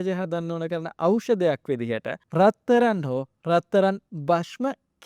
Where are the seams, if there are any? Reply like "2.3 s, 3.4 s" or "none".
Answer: 2.2 s